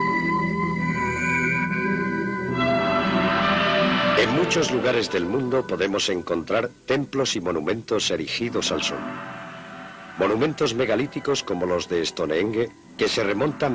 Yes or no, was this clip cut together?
no